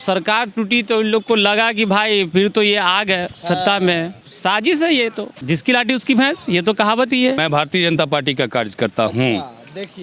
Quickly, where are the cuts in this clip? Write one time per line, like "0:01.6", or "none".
0:04.2
0:05.3
0:07.4